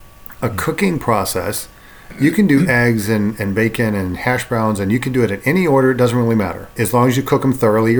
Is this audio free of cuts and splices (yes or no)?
no